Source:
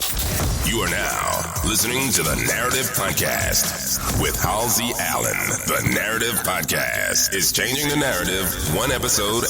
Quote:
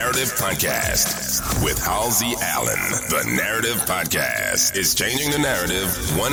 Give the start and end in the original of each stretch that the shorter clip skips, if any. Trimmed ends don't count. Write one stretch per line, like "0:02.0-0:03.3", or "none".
none